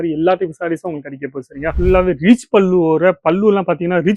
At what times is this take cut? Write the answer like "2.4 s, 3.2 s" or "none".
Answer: 1.7 s